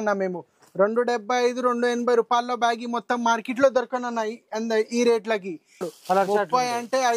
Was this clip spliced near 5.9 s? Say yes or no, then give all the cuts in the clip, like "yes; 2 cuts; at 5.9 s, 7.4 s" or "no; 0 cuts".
yes; 1 cut; at 5.9 s